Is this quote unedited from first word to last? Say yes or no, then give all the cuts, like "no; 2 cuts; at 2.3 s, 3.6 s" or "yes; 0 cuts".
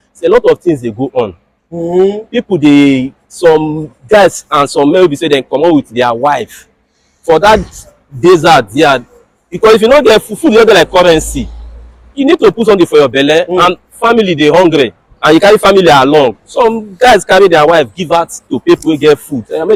yes; 0 cuts